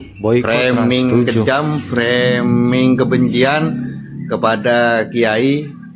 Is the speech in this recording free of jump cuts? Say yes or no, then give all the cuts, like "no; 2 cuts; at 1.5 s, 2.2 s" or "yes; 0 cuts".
yes; 0 cuts